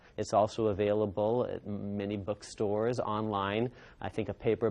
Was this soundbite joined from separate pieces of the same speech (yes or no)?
yes